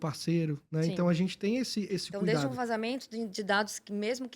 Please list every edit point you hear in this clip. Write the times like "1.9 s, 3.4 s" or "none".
2.1 s